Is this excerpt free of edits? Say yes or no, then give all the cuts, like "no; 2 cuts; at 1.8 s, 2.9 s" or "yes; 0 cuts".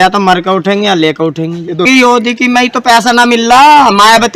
no; 1 cut; at 1.9 s